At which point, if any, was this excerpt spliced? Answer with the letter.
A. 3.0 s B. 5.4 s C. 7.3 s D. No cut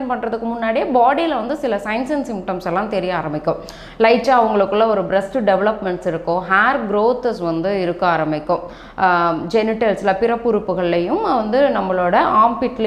D